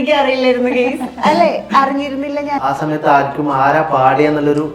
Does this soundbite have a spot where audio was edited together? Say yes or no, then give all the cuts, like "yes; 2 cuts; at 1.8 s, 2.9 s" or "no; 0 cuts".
yes; 1 cut; at 2.6 s